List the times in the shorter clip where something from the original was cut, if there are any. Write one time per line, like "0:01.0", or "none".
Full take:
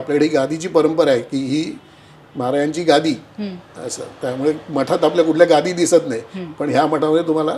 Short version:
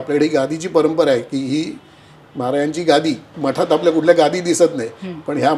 0:03.3